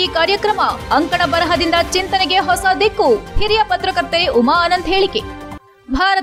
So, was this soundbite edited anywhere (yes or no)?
no